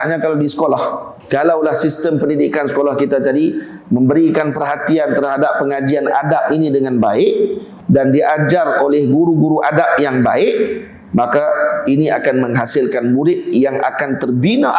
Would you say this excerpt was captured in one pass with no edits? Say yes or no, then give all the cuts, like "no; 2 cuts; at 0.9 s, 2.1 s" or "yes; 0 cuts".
no; 2 cuts; at 1.1 s, 7.7 s